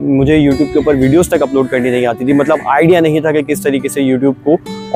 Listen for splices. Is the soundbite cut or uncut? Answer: uncut